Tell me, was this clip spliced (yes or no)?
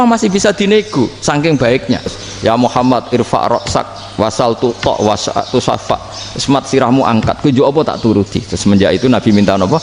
yes